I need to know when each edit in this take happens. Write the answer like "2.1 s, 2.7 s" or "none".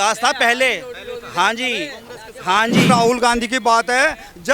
2.9 s